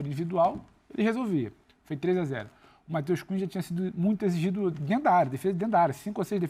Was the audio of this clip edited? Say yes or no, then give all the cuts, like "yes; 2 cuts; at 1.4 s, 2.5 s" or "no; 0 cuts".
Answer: no; 0 cuts